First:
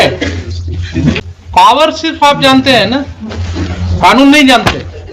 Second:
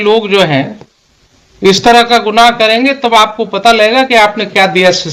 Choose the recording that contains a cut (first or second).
first